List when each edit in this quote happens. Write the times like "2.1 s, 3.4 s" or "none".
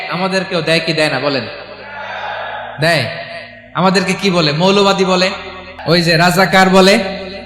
5.7 s